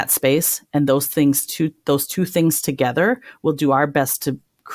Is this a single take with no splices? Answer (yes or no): yes